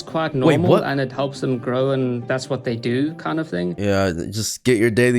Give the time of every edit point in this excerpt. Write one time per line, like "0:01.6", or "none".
0:03.8